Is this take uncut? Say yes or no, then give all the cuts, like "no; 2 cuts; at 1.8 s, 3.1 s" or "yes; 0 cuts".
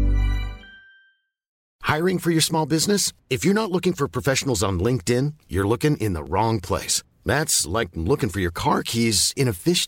no; 1 cut; at 1.6 s